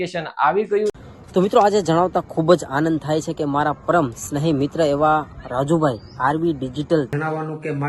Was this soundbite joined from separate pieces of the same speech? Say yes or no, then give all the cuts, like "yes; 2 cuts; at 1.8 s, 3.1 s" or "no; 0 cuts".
yes; 2 cuts; at 1.0 s, 7.1 s